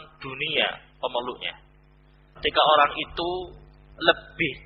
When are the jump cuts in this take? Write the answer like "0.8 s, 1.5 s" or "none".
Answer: 2.4 s